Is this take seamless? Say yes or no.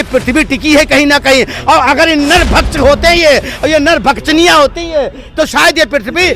yes